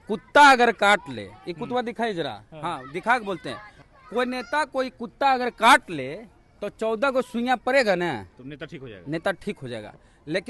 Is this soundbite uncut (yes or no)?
yes